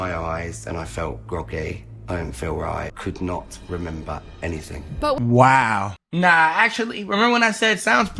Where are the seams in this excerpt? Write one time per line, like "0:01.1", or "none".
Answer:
0:02.9
0:06.0